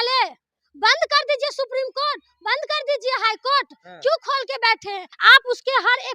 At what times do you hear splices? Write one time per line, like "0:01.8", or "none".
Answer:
0:05.1

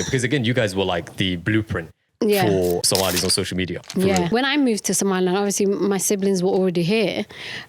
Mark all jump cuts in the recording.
0:02.8
0:04.3

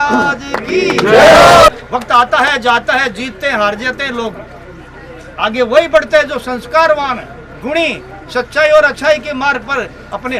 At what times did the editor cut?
0:01.7

